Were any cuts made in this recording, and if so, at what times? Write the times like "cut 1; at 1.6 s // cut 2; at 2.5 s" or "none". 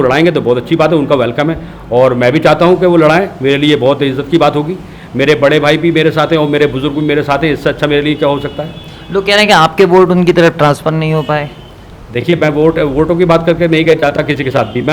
none